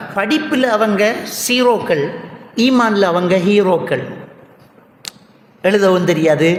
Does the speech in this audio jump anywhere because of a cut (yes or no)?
no